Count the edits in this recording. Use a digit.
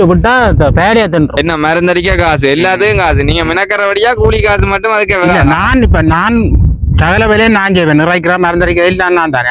1